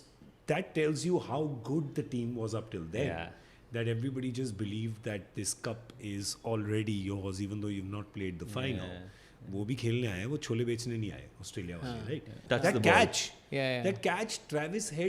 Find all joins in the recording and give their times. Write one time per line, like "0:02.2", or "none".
0:12.4

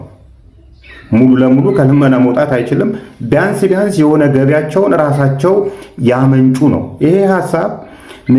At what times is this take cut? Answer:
none

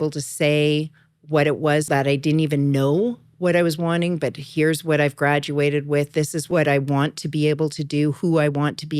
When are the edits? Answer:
0:01.9
0:06.4

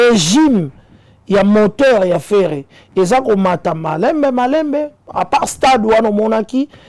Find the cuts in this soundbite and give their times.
none

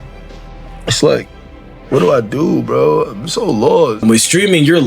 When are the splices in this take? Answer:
0:04.0

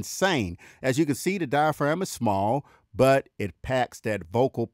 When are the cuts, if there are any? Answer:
none

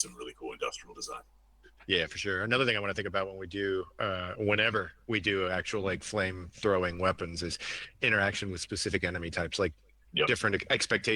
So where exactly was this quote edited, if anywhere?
0:08.1

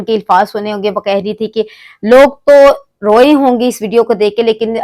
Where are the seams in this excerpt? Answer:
none

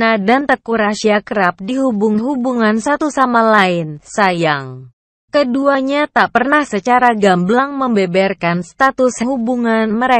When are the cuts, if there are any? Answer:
none

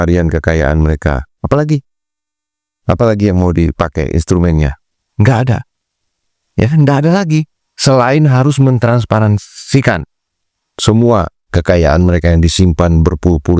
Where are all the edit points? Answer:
none

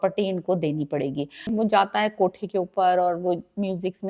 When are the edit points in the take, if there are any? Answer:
0:01.5

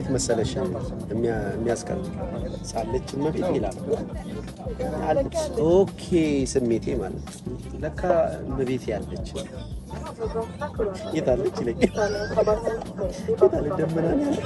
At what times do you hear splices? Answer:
none

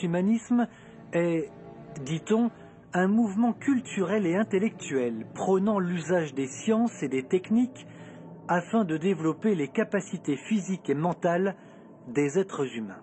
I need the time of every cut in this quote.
0:03.3

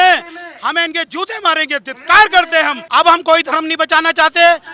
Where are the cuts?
0:02.8

